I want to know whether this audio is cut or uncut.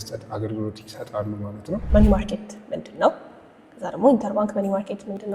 cut